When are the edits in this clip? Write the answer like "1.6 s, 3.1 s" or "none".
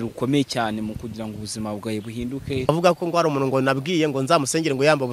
2.7 s